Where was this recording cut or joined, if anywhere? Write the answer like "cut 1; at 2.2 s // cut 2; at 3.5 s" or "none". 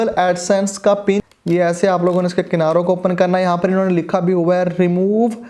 cut 1; at 1.2 s